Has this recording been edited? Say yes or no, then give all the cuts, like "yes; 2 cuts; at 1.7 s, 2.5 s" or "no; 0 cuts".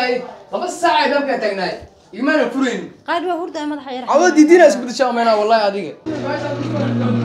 yes; 1 cut; at 6.0 s